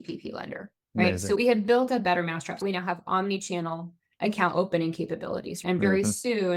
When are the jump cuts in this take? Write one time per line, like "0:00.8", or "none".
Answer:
0:01.4
0:02.6
0:05.6

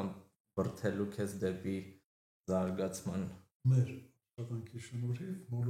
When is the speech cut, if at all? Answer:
0:03.4

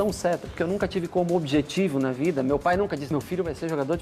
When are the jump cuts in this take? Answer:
0:03.1

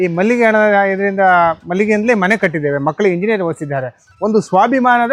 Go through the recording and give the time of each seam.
none

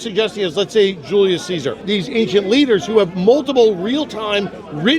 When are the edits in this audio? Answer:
0:01.8

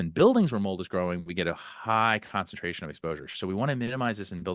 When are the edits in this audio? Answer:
none

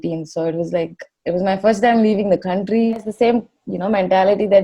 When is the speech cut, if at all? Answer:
0:03.0

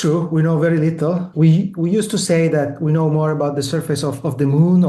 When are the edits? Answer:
0:01.3

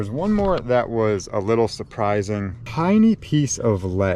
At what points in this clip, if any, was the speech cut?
0:02.6

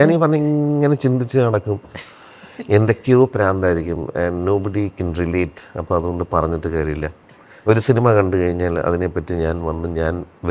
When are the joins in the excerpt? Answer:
none

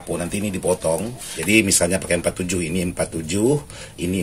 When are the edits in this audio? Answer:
0:01.3

